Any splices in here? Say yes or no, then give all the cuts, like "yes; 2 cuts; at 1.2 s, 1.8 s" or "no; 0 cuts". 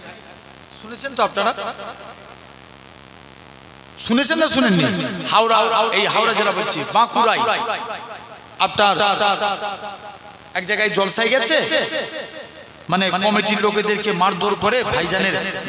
no; 0 cuts